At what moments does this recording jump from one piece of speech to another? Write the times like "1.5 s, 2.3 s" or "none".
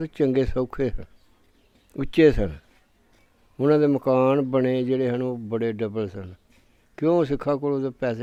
none